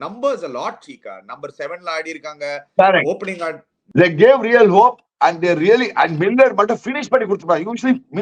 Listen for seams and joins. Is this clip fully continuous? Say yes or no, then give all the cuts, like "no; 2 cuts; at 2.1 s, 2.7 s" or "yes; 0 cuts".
no; 1 cut; at 3.7 s